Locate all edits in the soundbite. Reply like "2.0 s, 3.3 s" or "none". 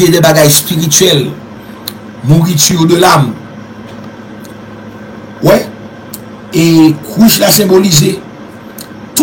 none